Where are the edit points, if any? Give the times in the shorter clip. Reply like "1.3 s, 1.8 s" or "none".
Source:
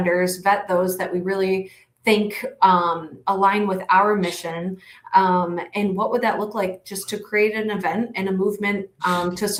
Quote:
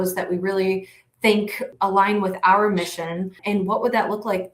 1.6 s, 3.4 s